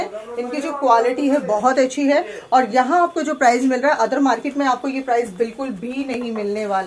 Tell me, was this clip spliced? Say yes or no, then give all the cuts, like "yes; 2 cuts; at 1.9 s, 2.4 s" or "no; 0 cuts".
no; 0 cuts